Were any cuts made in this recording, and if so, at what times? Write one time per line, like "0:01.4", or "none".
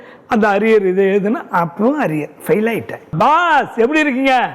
0:03.1